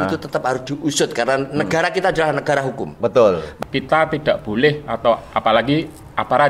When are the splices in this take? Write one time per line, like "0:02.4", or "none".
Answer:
0:03.5